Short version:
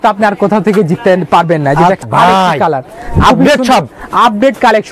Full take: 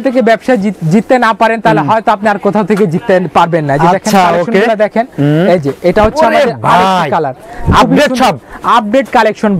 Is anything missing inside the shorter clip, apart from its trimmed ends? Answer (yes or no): yes